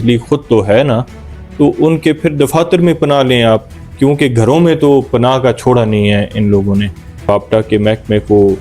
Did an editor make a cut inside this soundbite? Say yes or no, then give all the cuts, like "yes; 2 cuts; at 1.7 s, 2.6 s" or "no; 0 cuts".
yes; 1 cut; at 7.3 s